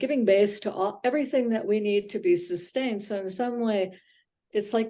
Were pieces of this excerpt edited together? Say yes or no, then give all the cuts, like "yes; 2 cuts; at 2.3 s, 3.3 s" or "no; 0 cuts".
no; 0 cuts